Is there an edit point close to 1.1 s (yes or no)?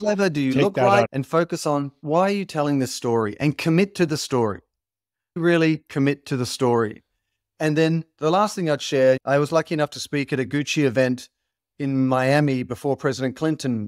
yes